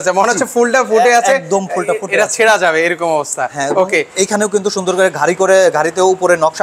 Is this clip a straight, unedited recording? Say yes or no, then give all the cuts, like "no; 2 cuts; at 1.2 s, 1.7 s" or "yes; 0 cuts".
yes; 0 cuts